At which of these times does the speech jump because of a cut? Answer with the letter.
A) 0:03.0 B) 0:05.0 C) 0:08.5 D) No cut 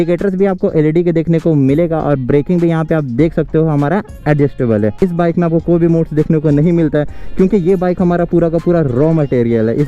B